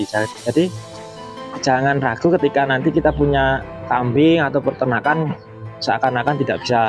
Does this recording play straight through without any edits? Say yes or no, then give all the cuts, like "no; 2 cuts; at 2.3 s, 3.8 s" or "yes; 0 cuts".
no; 1 cut; at 3.8 s